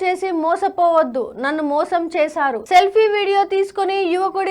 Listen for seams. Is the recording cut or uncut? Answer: uncut